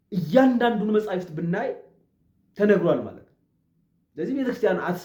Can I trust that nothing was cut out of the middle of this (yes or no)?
yes